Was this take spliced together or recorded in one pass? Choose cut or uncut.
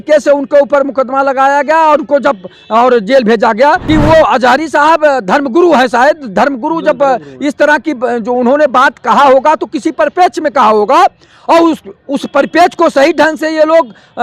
cut